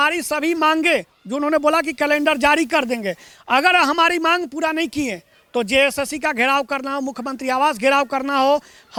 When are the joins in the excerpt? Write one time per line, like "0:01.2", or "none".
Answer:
none